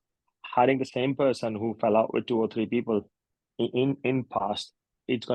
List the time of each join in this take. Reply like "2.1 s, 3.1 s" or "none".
none